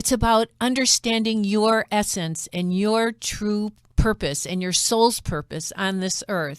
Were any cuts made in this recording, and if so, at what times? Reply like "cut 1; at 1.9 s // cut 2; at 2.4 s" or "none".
cut 1; at 3.8 s